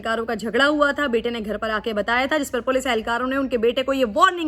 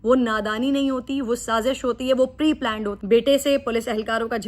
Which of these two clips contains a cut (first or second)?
second